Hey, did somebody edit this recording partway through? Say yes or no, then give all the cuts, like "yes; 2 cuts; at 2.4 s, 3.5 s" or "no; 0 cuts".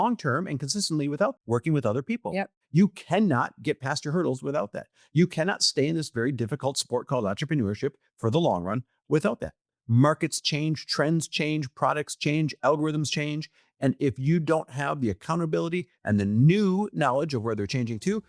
yes; 2 cuts; at 1.4 s, 2.6 s